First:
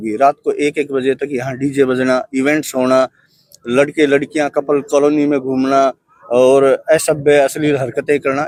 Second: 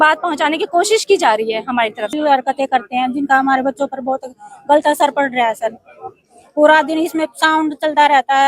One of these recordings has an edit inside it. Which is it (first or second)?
second